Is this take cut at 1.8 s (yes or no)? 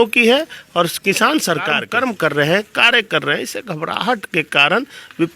yes